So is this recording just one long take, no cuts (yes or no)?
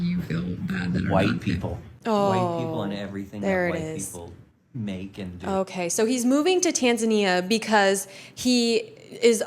yes